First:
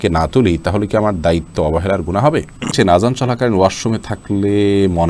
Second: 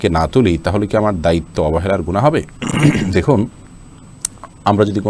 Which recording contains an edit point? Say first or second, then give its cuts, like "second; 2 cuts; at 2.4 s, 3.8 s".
first; 1 cut; at 2.7 s